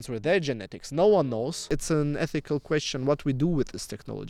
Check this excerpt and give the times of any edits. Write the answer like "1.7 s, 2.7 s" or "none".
1.6 s